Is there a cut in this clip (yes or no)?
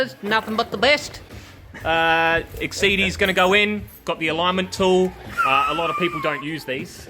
no